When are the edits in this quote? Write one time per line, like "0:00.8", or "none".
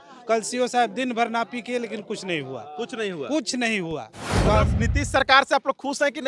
none

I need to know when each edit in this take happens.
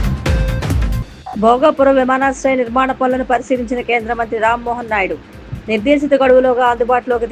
0:01.0

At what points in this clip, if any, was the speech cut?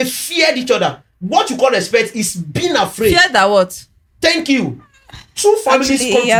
none

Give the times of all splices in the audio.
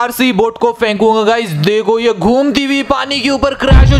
none

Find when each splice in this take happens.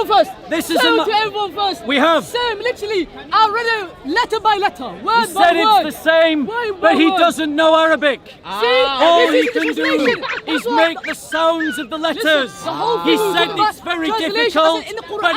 none

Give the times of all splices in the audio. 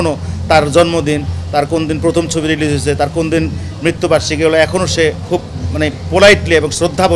none

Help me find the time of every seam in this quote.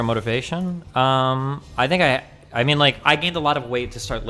none

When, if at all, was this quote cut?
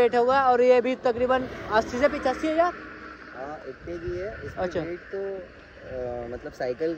none

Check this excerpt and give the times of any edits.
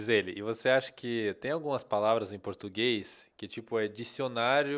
none

